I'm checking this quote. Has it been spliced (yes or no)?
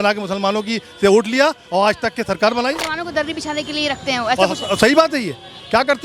yes